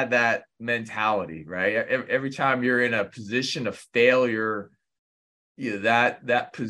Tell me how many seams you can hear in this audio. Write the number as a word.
zero